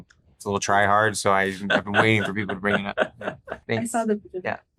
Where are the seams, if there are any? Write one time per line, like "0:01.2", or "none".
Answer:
0:03.6